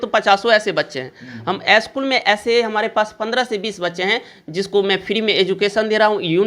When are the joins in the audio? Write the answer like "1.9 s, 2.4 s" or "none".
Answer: none